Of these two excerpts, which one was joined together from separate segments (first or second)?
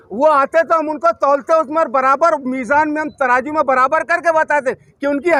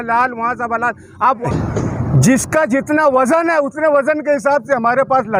second